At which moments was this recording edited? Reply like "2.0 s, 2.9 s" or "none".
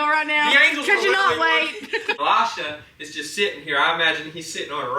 2.1 s